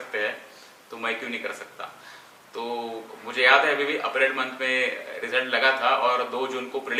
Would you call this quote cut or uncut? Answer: uncut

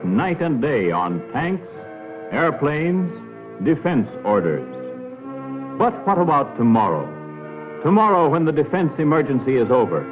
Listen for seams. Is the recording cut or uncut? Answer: cut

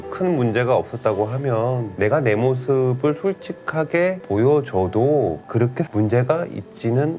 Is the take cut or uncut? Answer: uncut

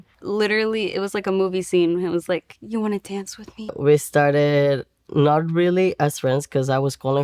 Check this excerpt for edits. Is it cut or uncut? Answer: cut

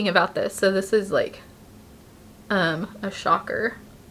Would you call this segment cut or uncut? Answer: uncut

